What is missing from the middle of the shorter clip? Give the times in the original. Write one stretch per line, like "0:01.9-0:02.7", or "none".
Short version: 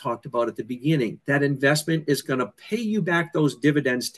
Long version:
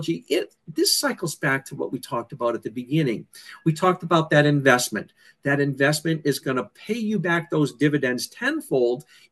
0:03.2-0:05.4